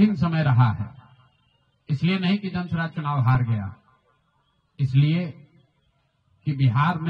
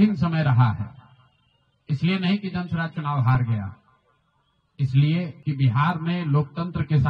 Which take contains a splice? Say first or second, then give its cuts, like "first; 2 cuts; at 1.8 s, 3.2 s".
second; 1 cut; at 5.4 s